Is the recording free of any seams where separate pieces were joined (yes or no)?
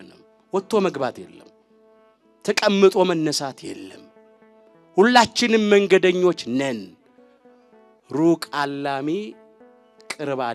yes